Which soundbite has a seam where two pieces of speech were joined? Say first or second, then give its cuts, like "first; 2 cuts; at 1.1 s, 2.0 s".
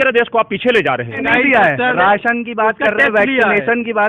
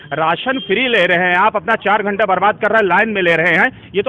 first; 1 cut; at 1.2 s